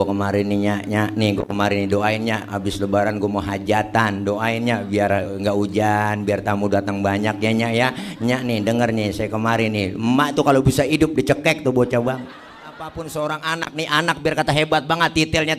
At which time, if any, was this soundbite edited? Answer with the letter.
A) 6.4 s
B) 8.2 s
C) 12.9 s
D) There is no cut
C